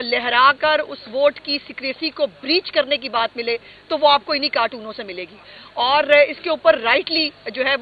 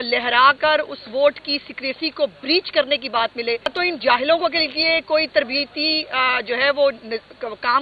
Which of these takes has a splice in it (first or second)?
second